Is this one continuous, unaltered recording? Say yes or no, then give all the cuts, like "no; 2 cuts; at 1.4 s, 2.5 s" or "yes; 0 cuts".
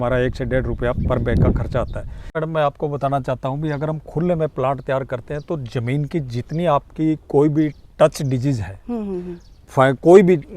no; 1 cut; at 2.4 s